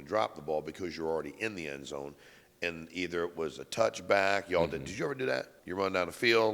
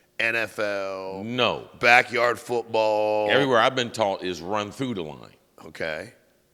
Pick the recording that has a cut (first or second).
first